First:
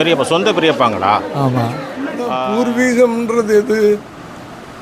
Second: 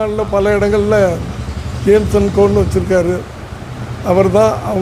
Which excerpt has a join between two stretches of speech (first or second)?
first